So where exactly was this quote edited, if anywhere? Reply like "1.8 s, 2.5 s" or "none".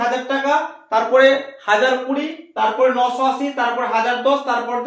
none